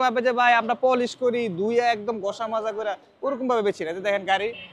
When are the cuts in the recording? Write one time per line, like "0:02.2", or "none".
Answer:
none